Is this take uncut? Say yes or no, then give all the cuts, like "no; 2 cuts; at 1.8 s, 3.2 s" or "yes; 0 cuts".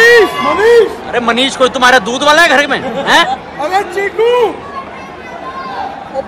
yes; 0 cuts